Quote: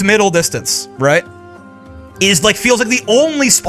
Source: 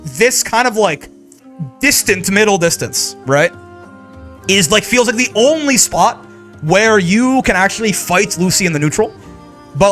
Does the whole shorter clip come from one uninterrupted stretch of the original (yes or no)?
yes